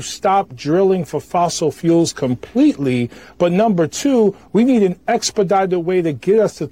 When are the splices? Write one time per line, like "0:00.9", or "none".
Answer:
0:03.2

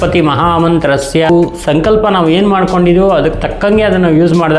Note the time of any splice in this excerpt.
0:01.3

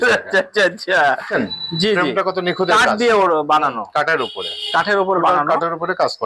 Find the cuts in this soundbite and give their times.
0:01.3

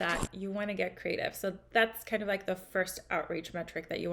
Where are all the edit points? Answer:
none

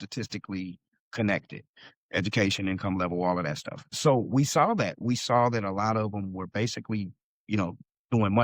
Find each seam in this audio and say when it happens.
0:03.8

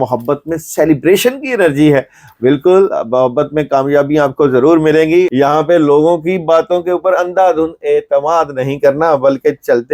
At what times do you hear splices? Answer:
0:05.3

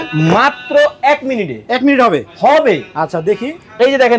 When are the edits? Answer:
none

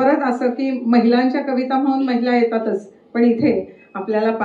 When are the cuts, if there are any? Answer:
none

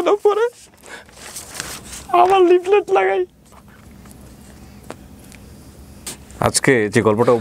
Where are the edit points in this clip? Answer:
0:06.1

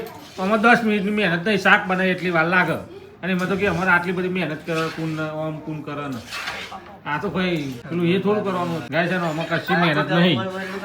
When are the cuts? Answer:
0:07.8
0:08.8

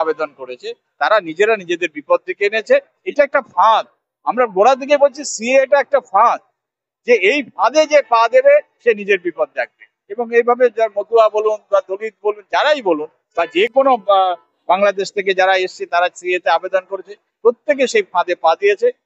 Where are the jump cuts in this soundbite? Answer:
0:03.0

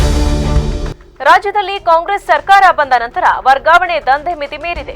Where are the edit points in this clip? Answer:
0:00.9

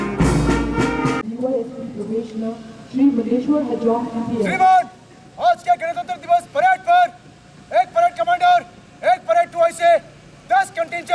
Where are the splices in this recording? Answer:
0:01.3

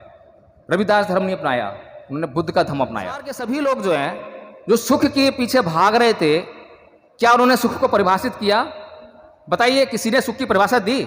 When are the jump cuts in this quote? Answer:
0:03.3

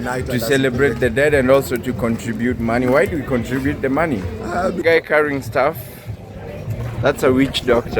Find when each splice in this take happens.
0:04.8

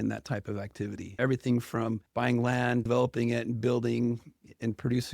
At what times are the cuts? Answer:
0:01.2
0:02.0
0:02.8

